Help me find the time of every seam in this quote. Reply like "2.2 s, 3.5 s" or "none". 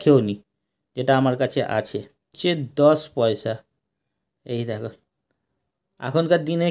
2.3 s